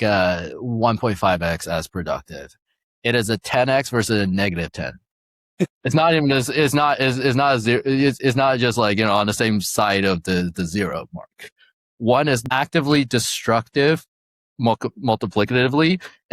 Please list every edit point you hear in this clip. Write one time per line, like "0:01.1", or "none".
0:05.5
0:12.4